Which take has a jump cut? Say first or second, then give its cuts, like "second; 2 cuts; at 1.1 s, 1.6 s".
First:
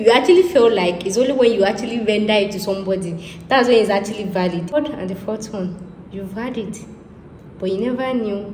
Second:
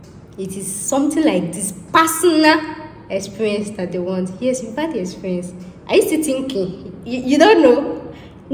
first; 1 cut; at 4.8 s